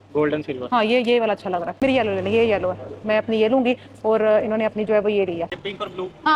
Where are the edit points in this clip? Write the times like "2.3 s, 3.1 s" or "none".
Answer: 1.7 s, 5.5 s